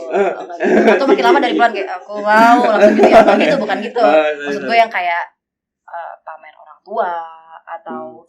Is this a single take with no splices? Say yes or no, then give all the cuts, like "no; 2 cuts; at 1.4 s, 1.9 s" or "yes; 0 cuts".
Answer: yes; 0 cuts